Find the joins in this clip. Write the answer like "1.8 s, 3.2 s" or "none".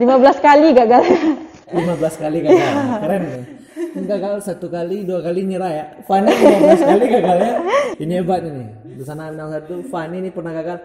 none